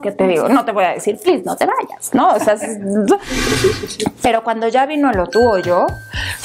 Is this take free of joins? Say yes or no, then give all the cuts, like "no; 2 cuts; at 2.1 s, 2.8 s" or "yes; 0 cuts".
no; 1 cut; at 3.4 s